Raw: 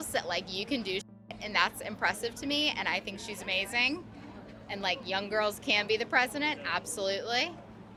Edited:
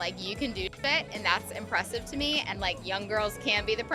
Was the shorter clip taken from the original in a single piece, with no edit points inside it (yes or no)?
no